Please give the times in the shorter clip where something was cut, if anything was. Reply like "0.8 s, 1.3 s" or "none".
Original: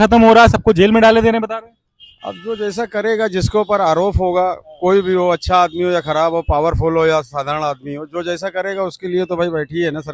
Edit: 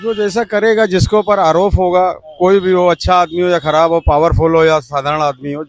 none

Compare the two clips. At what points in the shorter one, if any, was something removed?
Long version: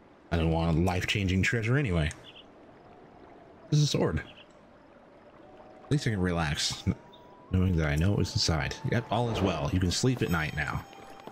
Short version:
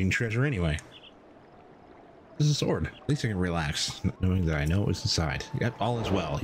3.0 s, 4.2 s

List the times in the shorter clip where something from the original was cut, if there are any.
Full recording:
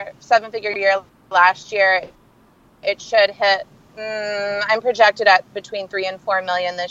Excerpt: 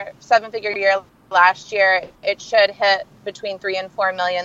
2.1 s, 3.3 s

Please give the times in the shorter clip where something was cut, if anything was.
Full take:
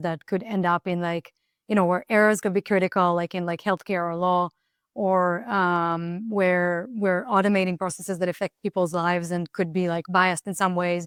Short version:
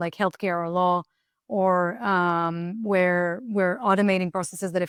none

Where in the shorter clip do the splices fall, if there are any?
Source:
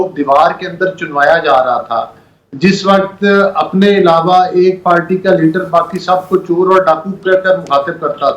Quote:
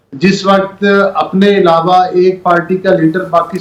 none

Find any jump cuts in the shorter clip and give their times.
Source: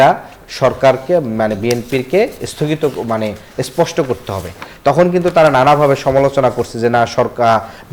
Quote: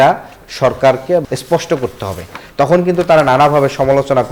1.3 s

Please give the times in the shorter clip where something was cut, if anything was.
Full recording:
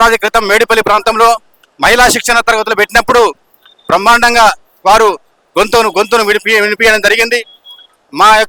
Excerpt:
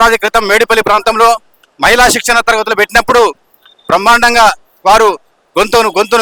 none

